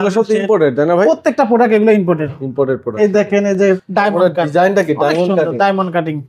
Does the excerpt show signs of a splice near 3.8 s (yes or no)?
yes